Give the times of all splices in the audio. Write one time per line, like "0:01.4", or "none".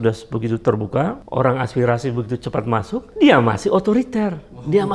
0:01.2
0:03.1